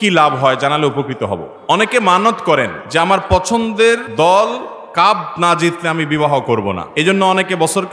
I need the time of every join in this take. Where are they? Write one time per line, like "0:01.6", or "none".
0:01.5
0:02.8
0:04.1
0:06.9